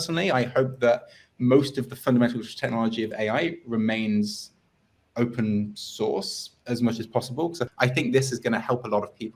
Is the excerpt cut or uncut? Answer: cut